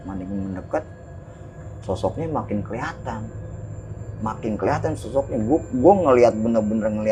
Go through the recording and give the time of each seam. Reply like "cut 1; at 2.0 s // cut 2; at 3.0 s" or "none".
none